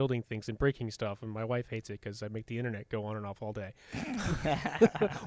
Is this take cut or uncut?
uncut